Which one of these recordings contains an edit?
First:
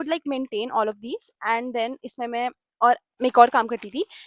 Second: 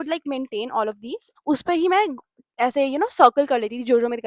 second; 1 cut; at 1.3 s

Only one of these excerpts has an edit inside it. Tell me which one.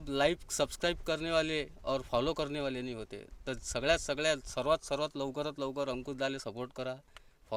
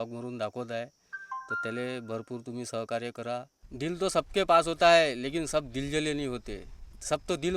second; 1 cut; at 3.6 s

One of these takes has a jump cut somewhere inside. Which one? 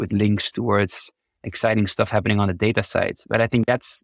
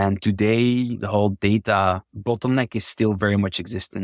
second; 2 cuts; at 1.0 s, 2.1 s

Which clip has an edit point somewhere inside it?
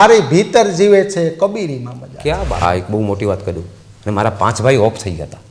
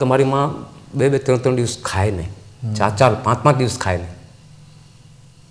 first; 1 cut; at 2.6 s

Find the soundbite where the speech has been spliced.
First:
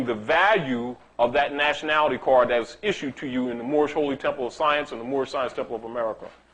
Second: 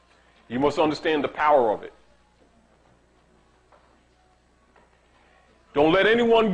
first; 1 cut; at 1.1 s

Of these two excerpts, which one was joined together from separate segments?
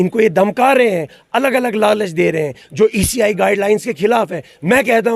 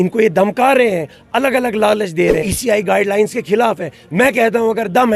second; 1 cut; at 2.5 s

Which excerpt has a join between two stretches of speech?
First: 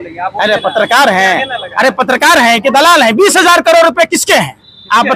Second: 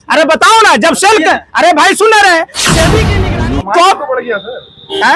second; 1 cut; at 3.1 s

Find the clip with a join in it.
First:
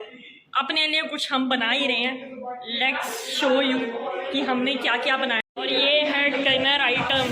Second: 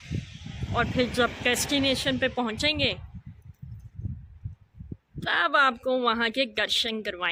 first; 1 cut; at 5.4 s

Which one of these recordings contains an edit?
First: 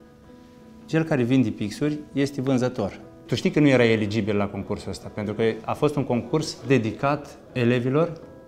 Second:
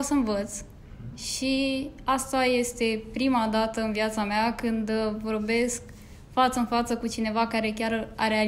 first; 3 cuts; at 3.1 s, 6.5 s, 7.4 s

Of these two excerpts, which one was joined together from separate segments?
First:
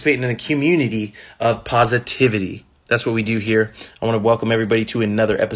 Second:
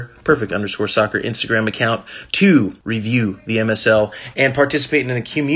second; 1 cut; at 2.8 s

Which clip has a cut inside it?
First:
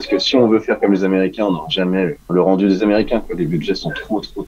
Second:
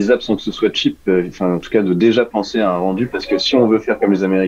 first; 1 cut; at 2.2 s

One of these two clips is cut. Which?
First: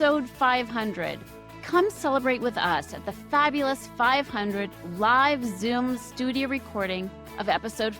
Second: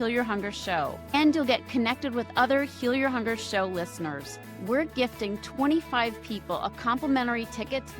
second; 1 cut; at 1.1 s

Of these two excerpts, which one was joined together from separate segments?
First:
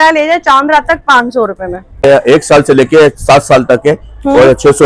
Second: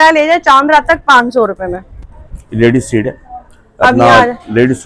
first; 1 cut; at 2.0 s

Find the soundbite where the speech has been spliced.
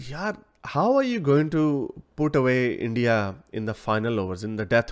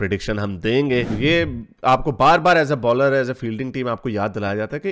second; 1 cut; at 1.1 s

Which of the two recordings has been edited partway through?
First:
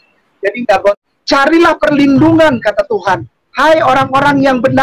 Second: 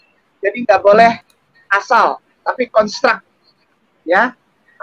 first; 1 cut; at 0.9 s

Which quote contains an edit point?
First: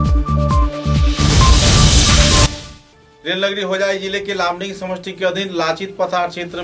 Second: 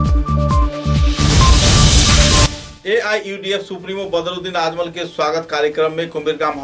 first; 1 cut; at 2.7 s

